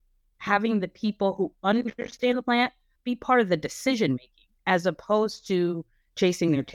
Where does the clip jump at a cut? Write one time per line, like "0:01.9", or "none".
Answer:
0:02.9